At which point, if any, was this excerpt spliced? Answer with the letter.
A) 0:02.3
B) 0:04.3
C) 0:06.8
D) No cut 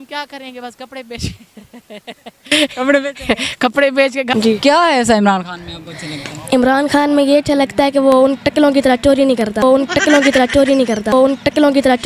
B